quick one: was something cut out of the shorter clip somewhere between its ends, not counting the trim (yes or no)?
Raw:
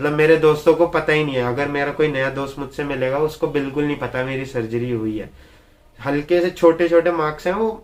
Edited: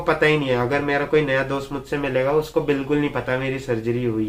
no